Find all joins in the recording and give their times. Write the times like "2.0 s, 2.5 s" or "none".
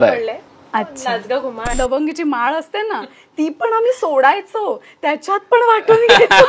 1.7 s